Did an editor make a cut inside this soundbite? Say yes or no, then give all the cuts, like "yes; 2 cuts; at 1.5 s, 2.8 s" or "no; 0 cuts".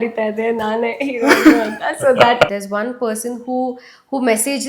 yes; 1 cut; at 2.5 s